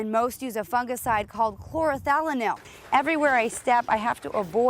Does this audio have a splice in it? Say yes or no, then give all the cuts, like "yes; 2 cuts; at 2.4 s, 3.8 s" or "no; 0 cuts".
yes; 1 cut; at 2.7 s